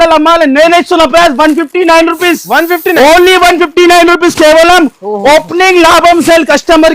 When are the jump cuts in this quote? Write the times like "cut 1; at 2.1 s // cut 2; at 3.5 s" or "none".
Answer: none